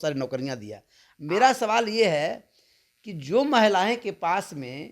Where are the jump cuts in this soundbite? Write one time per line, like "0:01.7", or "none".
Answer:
0:01.2